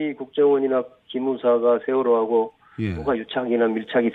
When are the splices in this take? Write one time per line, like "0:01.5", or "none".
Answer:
none